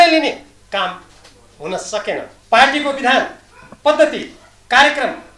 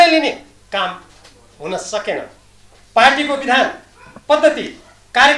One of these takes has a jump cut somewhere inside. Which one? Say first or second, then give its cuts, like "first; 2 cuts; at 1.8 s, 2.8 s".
first; 1 cut; at 2.3 s